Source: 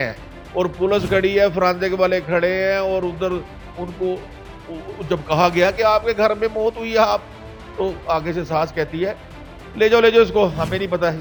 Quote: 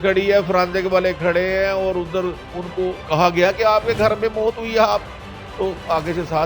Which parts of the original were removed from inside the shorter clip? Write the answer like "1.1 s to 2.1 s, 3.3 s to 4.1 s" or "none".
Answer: 4.0 s to 5.1 s